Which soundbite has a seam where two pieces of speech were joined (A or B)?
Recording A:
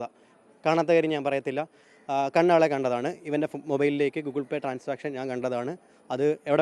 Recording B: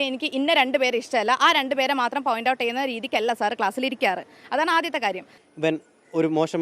B